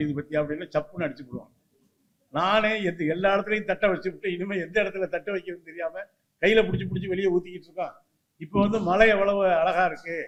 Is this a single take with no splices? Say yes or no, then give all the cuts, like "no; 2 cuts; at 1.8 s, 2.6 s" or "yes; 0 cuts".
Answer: yes; 0 cuts